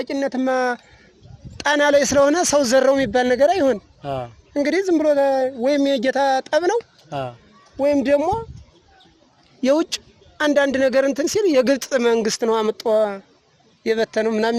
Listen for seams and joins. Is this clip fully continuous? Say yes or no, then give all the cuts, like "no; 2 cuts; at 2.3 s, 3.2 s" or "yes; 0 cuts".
yes; 0 cuts